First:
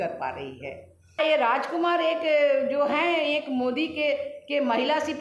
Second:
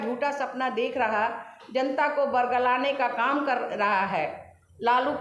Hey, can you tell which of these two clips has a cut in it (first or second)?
first